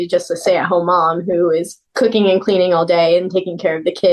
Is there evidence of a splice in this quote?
no; 0 cuts

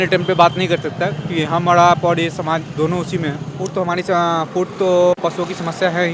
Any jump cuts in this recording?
yes; 1 cut; at 3.5 s

